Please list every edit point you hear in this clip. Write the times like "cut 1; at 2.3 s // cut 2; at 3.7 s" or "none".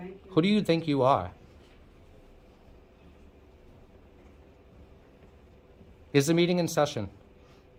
none